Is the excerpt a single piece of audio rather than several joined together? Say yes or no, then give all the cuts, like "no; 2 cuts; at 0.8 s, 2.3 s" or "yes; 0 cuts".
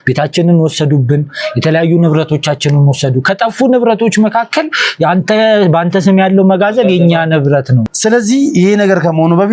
no; 1 cut; at 7.9 s